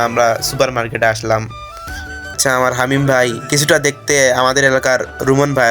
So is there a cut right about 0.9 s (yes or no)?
no